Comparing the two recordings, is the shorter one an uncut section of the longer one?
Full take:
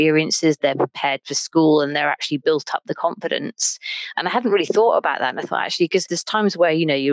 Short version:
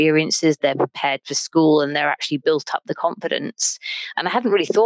yes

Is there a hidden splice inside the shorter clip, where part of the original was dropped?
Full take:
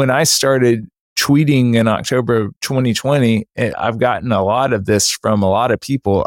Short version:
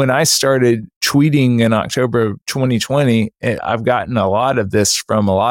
yes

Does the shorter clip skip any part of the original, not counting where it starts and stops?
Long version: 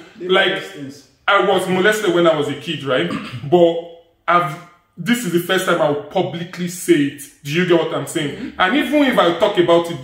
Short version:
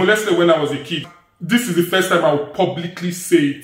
yes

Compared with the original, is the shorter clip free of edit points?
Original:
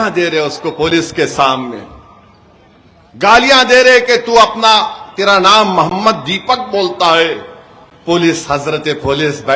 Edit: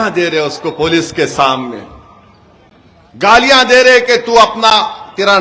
yes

